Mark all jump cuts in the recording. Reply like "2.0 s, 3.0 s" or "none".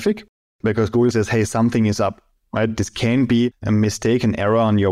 3.6 s